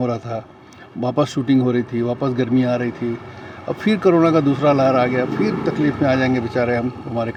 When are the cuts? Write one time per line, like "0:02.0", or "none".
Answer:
none